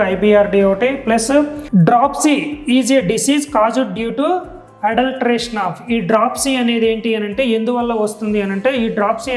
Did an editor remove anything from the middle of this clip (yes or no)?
yes